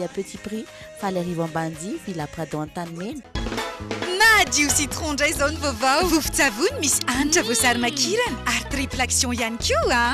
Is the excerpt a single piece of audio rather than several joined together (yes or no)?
no